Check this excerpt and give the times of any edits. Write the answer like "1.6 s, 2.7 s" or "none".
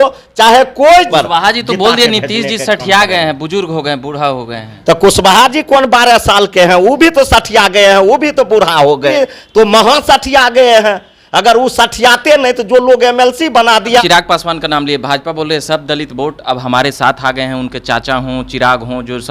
1.1 s, 9.1 s, 14.0 s